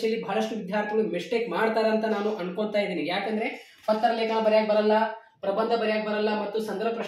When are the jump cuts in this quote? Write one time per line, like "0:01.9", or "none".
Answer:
none